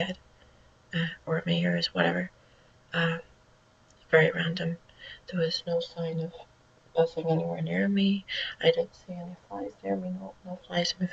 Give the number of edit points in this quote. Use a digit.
1